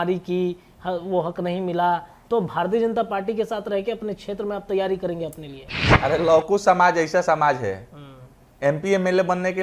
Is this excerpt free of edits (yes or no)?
yes